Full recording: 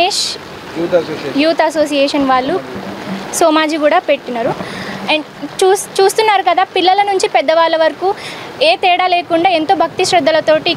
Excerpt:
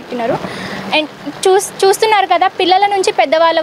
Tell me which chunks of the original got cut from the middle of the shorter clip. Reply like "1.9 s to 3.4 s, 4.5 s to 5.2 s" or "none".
none